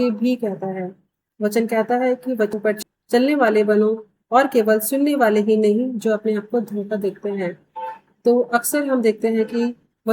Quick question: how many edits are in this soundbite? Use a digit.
1